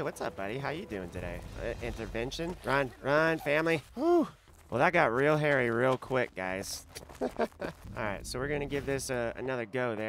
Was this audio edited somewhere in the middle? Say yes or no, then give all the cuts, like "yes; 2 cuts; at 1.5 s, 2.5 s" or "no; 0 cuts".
yes; 1 cut; at 7.8 s